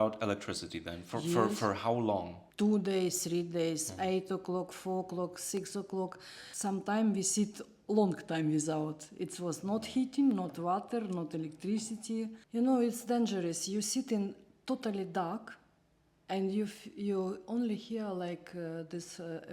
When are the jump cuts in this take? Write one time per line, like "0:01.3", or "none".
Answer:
0:02.4
0:12.4